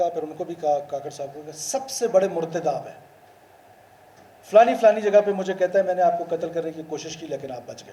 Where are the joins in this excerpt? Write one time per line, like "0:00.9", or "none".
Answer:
none